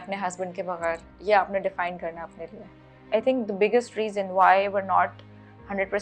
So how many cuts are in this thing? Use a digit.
1